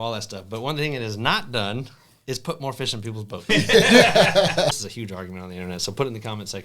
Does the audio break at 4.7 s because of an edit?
yes; 1 cut; at 4.7 s

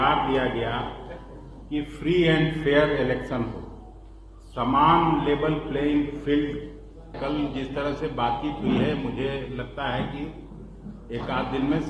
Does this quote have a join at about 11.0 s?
no; 1 cut; at 7.2 s

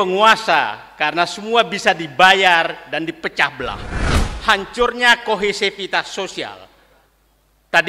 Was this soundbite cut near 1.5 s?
no; 1 cut; at 4.2 s

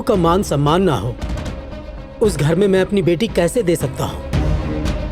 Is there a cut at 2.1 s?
no; 0 cuts

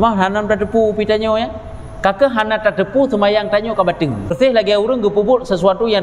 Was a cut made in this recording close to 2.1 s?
no; 1 cut; at 4.3 s

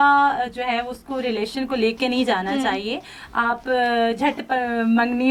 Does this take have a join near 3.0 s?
no; 0 cuts

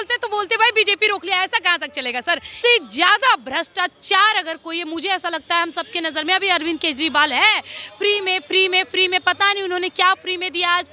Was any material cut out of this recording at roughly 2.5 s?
yes; 1 cut; at 2.5 s

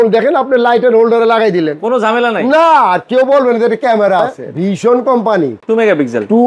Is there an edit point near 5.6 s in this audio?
yes; 2 cuts; at 4.4 s, 5.6 s

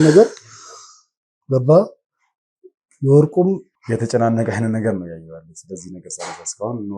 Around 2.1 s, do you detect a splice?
no; 1 cut; at 3.7 s

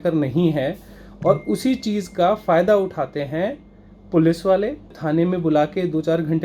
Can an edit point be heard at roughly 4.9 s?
yes; 1 cut; at 4.9 s

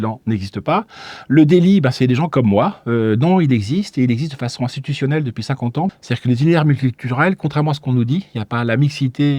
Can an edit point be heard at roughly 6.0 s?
yes; 1 cut; at 6.0 s

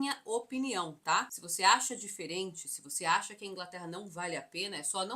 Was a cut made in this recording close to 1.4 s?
yes; 1 cut; at 1.4 s

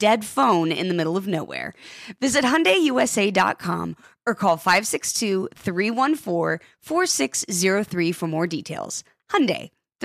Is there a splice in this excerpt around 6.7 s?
no; 0 cuts

